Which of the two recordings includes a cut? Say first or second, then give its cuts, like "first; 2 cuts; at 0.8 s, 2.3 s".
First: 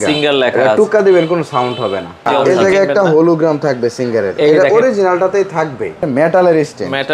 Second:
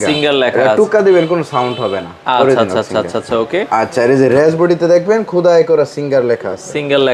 first; 2 cuts; at 2.5 s, 6.0 s